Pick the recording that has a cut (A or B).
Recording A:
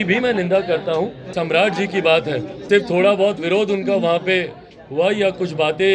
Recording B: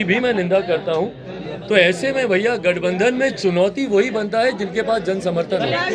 A